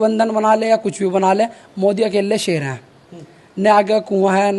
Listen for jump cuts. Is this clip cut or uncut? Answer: uncut